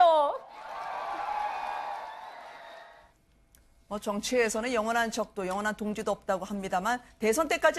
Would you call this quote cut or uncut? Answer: cut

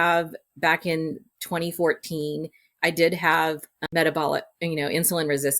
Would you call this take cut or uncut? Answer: cut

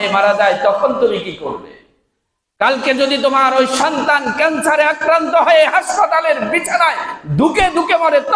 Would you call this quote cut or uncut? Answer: uncut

